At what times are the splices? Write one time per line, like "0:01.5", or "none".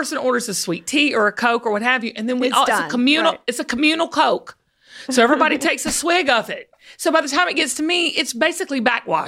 none